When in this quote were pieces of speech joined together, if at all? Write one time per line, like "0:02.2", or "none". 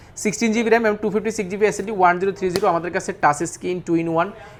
none